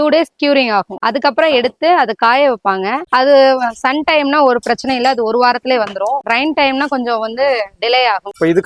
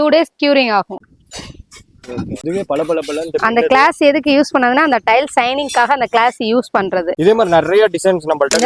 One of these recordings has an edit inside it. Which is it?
second; 3 cuts; at 1.0 s, 2.4 s, 7.1 s

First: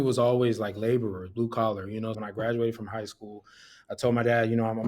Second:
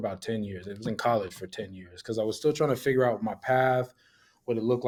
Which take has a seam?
first; 1 cut; at 2.2 s

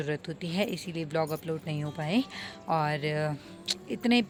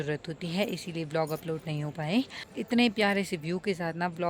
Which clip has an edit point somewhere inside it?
second; 1 cut; at 2.5 s

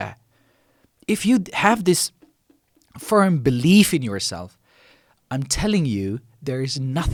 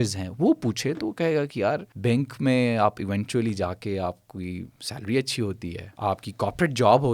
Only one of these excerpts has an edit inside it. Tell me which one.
second; 2 cuts; at 1.9 s, 5.8 s

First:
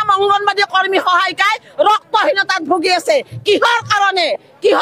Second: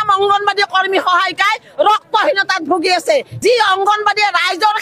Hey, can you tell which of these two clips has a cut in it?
second; 1 cut; at 3.3 s

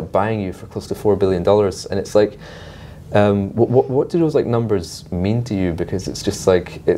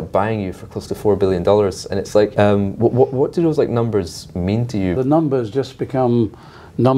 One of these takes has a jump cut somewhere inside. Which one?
second; 2 cuts; at 2.3 s, 5.0 s

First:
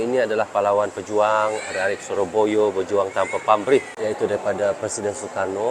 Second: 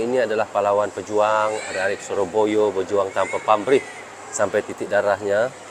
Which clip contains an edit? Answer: first; 1 cut; at 3.9 s

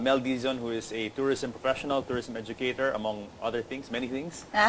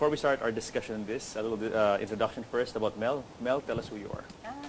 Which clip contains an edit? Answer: second; 1 cut; at 2.9 s

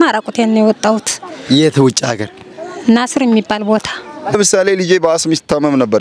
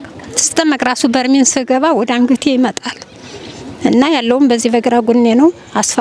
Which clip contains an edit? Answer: first; 1 cut; at 4.4 s

